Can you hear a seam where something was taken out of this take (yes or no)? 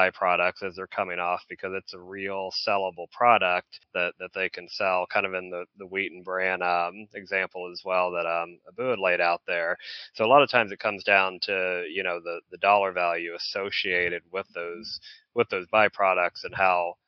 no